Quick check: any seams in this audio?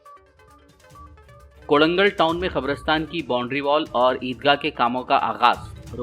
no; 0 cuts

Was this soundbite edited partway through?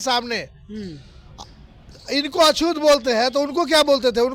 no; 0 cuts

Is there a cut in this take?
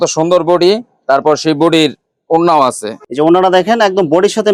no; 0 cuts

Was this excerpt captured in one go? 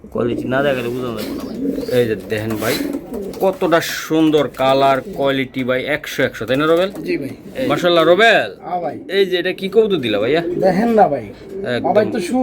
no; 2 cuts; at 1.3 s, 7.6 s

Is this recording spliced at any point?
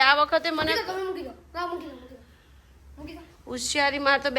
no; 0 cuts

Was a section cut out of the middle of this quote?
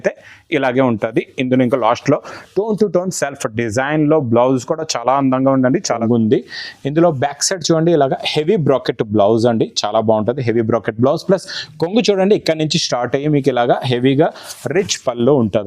yes; 1 cut; at 5.9 s

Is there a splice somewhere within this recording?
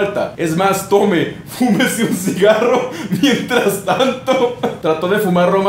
yes; 1 cut; at 4.8 s

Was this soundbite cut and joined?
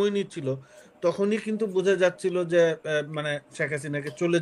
no; 0 cuts

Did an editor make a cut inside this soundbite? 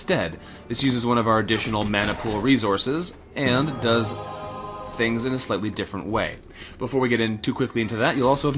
no; 0 cuts

